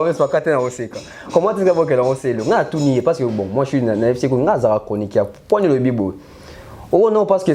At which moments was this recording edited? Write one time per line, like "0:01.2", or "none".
none

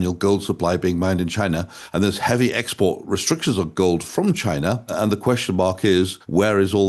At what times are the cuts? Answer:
0:01.8
0:04.9

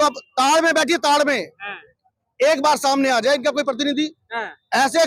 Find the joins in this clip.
none

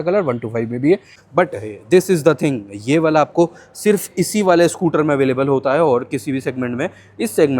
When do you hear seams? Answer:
0:01.2

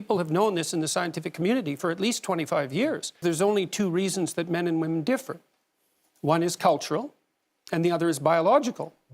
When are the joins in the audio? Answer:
0:03.2

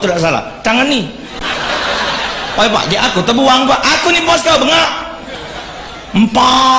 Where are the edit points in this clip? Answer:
none

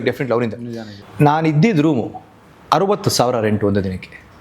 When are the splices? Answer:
0:01.0

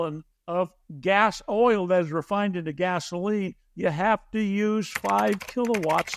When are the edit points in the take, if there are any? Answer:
none

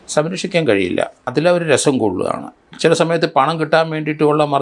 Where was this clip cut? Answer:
0:01.3

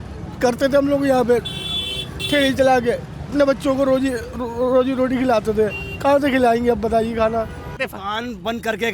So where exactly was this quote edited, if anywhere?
0:03.3
0:07.7

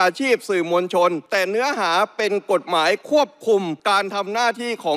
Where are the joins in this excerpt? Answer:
0:01.2
0:03.8

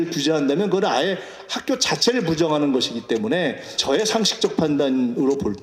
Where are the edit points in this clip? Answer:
0:03.8

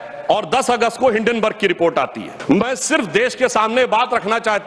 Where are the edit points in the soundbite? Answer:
0:02.3

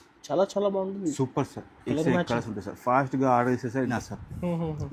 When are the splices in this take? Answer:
0:04.0

